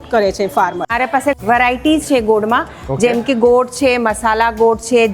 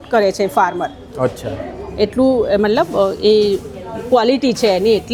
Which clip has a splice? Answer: first; 1 cut; at 1.2 s

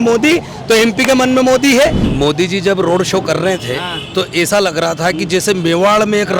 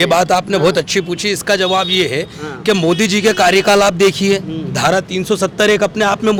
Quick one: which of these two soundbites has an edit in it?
first; 1 cut; at 2.0 s

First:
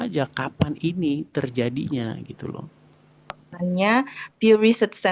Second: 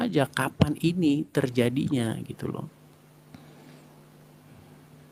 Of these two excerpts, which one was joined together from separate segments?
first; 1 cut; at 3.5 s

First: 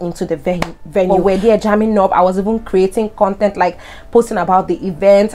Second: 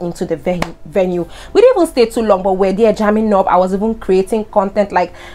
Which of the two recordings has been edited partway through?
first; 1 cut; at 1.1 s

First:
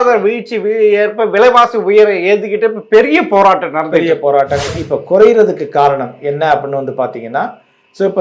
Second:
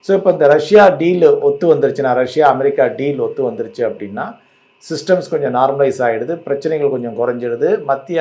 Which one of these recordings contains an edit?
first; 1 cut; at 4.7 s

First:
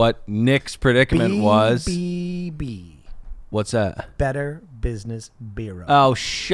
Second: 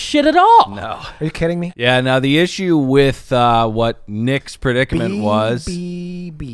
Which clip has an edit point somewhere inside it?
second; 1 cut; at 1.7 s

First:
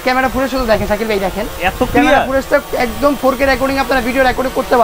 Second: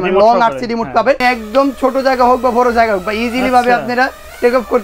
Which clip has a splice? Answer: second; 1 cut; at 1.2 s

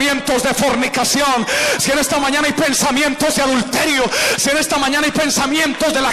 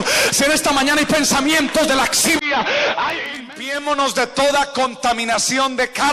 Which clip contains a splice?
second; 1 cut; at 3.4 s

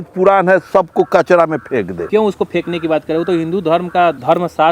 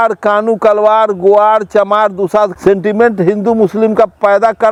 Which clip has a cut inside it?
first; 1 cut; at 2.0 s

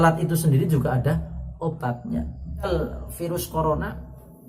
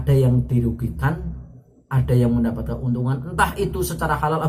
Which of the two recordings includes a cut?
first; 1 cut; at 2.7 s

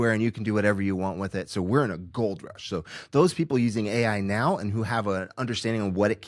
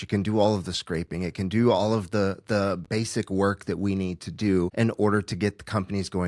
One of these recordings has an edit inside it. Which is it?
second; 1 cut; at 4.7 s

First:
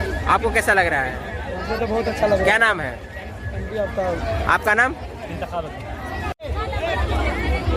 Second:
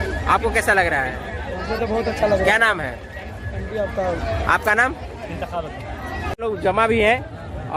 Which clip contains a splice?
first; 1 cut; at 6.4 s

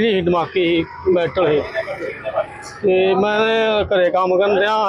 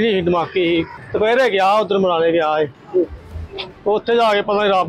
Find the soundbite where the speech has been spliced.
second; 1 cut; at 0.9 s

